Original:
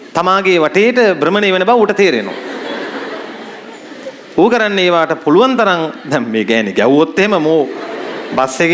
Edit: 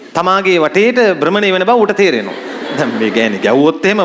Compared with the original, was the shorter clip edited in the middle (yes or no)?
yes